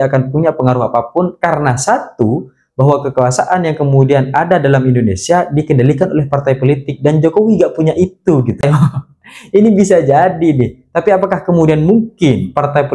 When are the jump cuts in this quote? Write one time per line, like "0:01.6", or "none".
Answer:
0:08.6